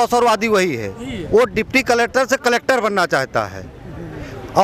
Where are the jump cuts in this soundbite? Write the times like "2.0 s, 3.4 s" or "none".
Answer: none